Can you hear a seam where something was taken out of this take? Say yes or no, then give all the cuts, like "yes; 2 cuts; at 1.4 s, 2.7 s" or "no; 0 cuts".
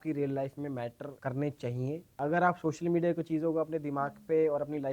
yes; 2 cuts; at 1.1 s, 2.1 s